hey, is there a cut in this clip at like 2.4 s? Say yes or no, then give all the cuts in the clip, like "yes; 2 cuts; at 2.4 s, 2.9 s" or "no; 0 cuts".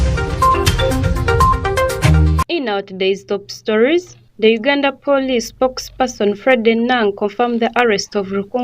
yes; 1 cut; at 2.4 s